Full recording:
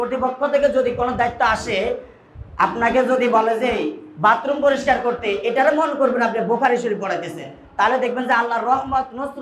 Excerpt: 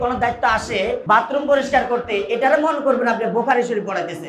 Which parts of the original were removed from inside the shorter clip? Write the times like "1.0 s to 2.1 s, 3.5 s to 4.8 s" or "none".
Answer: 2.0 s to 4.1 s